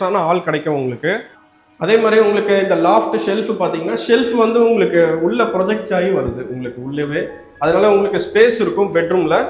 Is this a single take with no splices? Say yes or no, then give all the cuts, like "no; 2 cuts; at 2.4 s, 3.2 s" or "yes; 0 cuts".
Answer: no; 1 cut; at 1.4 s